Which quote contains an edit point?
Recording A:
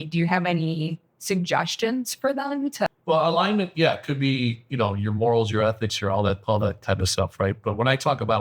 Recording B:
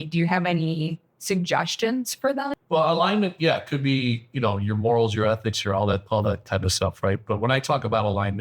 B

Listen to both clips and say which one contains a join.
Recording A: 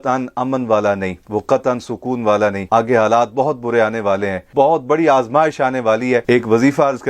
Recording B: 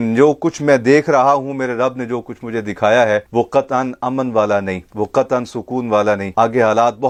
A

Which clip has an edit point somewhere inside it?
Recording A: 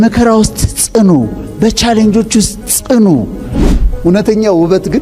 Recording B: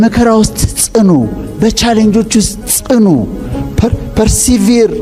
A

